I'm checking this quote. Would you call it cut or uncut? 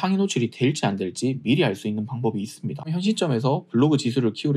cut